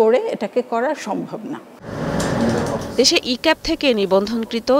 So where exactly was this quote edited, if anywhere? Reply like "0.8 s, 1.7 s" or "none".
none